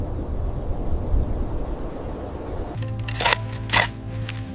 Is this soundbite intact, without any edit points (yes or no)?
no